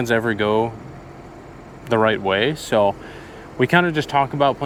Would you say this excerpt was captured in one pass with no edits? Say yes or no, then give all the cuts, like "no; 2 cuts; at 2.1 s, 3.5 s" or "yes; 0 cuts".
yes; 0 cuts